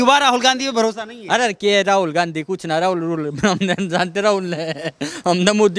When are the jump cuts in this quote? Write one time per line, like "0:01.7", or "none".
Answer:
none